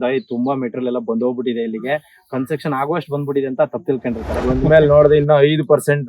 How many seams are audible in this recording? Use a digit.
1